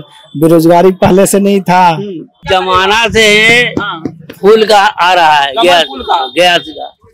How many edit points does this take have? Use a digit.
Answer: 1